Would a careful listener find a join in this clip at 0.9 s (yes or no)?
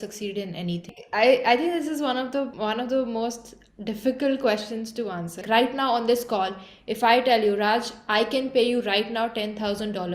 yes